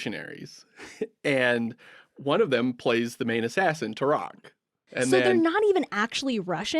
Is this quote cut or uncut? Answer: cut